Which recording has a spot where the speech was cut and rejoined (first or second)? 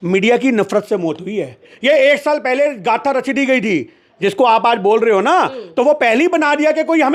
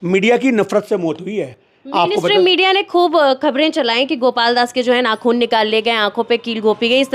first